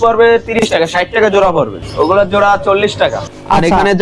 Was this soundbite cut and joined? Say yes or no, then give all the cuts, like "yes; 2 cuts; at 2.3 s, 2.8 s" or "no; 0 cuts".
yes; 2 cuts; at 1.8 s, 3.1 s